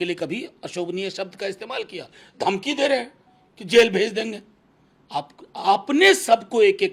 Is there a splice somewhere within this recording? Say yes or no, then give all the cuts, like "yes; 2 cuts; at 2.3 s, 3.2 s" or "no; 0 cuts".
no; 0 cuts